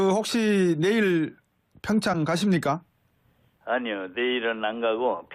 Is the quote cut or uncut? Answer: cut